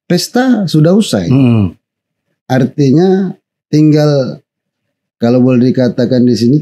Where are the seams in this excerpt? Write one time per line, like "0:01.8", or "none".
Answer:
none